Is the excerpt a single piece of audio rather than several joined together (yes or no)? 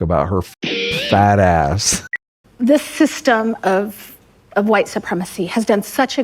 no